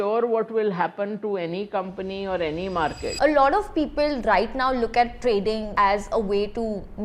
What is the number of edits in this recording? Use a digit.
2